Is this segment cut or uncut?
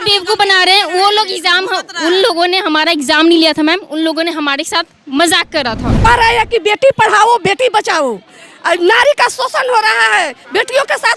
cut